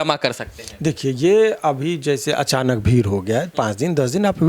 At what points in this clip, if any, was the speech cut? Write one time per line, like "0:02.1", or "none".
none